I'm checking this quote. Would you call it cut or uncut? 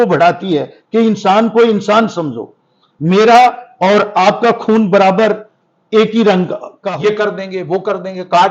cut